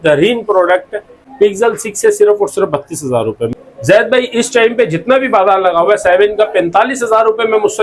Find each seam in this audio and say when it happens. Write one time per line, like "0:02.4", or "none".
0:01.2
0:03.5